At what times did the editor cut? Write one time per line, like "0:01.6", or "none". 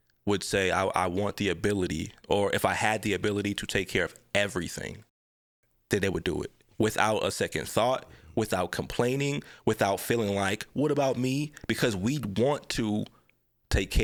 none